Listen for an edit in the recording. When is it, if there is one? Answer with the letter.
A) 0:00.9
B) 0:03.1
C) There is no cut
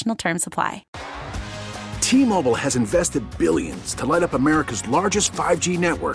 A